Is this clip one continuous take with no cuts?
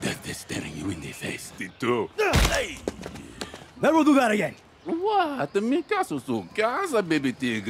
no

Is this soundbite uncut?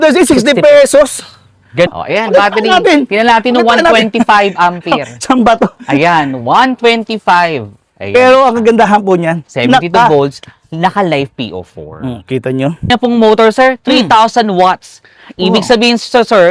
no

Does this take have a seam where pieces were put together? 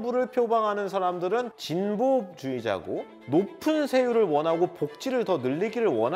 yes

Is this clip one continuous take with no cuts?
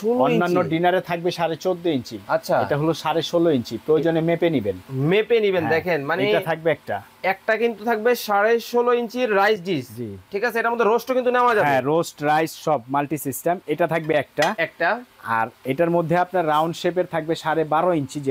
yes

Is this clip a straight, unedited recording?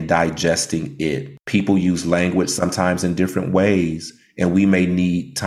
no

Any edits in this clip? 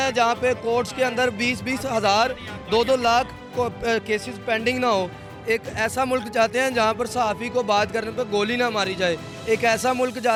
no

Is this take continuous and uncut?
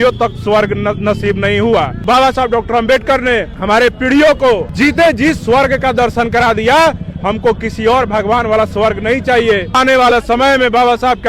no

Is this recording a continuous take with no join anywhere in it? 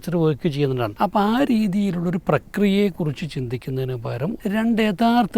no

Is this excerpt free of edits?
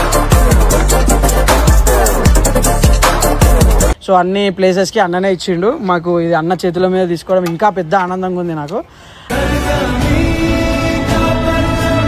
yes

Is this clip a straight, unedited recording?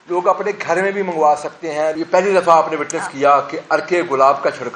no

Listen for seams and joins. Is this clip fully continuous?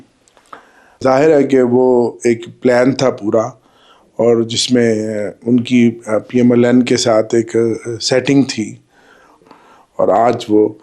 no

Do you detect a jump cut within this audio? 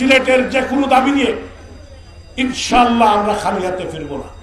no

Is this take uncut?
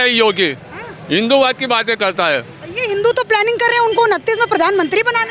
yes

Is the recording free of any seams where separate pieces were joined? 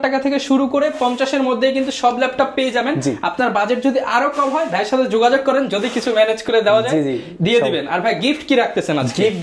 yes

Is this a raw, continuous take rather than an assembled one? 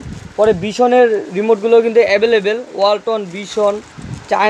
yes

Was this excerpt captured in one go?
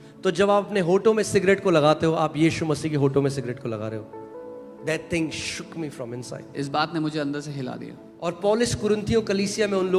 no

